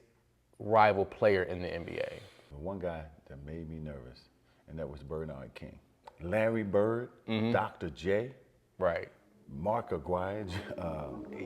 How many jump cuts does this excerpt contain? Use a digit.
2